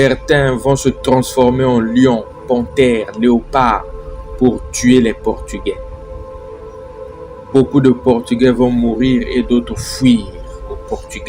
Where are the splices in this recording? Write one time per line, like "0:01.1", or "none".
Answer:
0:05.7
0:07.5